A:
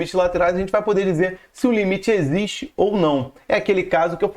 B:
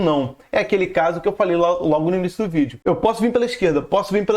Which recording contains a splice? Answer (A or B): B